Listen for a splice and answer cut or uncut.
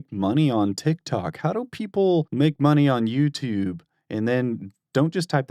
cut